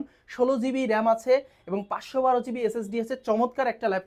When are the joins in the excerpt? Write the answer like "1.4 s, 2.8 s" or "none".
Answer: none